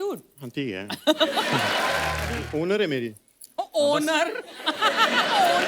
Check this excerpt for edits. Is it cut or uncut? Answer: cut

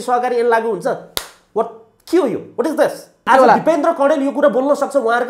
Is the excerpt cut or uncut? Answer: cut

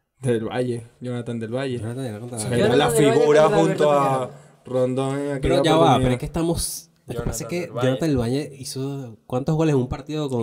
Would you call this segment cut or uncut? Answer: uncut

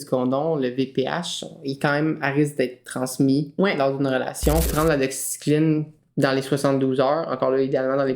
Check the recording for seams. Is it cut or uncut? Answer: cut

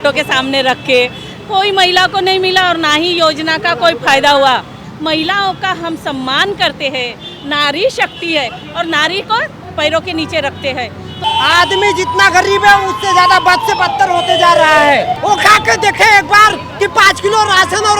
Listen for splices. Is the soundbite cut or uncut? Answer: cut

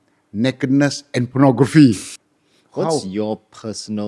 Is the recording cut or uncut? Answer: cut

